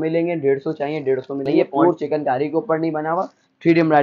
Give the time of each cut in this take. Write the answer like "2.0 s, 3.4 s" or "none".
1.6 s